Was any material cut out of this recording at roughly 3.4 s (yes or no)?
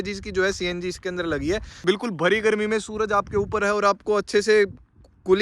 no